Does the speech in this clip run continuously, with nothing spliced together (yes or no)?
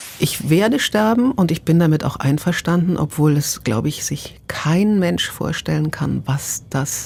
yes